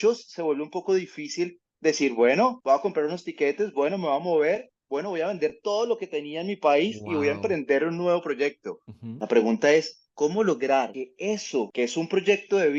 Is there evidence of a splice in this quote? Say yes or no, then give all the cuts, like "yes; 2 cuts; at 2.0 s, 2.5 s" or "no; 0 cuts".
no; 0 cuts